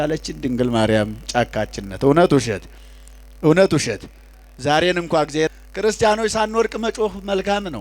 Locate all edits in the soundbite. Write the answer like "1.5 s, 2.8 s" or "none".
5.5 s